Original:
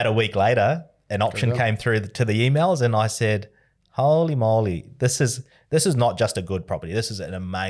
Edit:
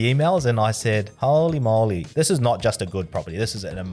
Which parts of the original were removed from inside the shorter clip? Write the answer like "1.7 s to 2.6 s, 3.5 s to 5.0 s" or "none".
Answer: 3.5 s to 3.9 s, 4.8 s to 5.6 s